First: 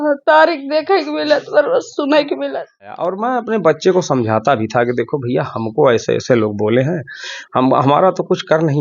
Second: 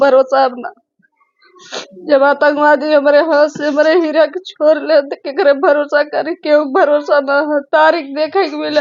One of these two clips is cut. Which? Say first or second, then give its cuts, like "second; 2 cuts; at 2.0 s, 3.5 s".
first; 1 cut; at 3.0 s